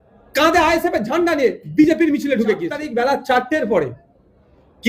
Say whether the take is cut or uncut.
cut